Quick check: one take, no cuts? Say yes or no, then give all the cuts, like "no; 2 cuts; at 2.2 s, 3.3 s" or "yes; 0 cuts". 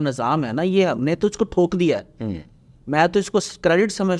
yes; 0 cuts